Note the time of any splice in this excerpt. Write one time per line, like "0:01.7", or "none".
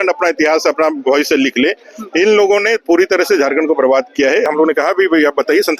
0:04.5